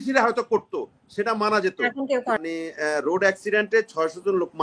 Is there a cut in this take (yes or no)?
yes